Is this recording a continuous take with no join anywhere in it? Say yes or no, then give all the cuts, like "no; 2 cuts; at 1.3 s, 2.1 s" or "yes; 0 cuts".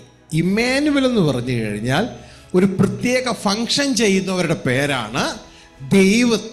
yes; 0 cuts